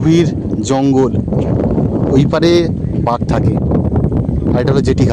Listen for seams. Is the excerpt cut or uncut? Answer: uncut